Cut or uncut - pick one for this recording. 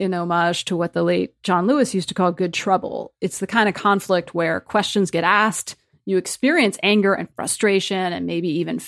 uncut